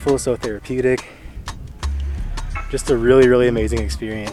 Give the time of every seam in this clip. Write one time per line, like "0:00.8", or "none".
none